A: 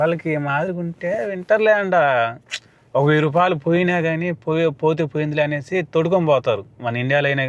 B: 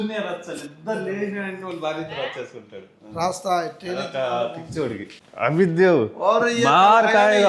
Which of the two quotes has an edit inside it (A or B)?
B